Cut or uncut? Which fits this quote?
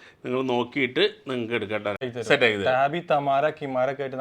cut